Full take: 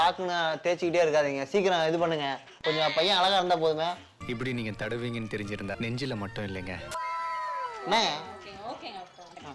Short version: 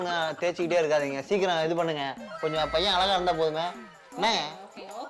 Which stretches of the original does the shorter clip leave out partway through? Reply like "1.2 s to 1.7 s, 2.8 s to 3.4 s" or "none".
4.2 s to 7.7 s